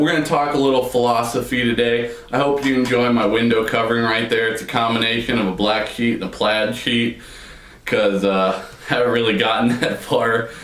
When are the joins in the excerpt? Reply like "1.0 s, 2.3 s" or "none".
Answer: 8.2 s